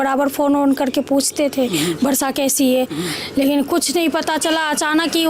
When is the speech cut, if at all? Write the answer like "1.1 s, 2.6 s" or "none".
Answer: none